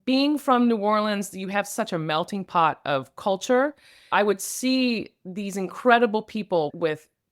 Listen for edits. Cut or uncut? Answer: uncut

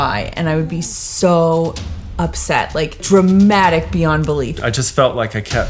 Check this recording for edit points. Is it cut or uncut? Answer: cut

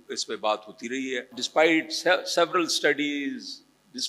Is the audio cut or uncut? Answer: cut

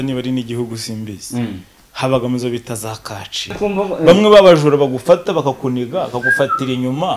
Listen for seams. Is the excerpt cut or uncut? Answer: cut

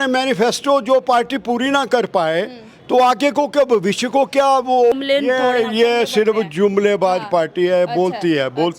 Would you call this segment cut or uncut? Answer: cut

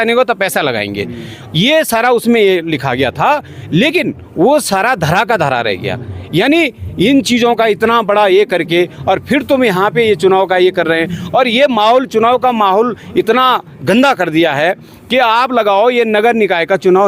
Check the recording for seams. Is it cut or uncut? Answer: uncut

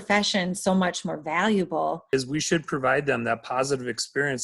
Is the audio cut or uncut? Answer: cut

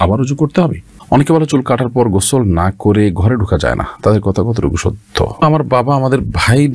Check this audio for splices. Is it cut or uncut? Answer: cut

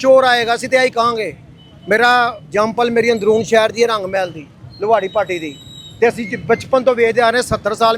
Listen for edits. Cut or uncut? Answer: uncut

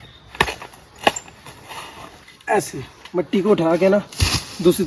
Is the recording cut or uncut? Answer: uncut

